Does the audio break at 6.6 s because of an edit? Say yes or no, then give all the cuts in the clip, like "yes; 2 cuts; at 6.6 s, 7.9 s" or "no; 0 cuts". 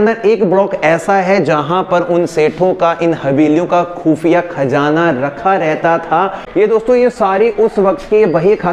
yes; 1 cut; at 6.6 s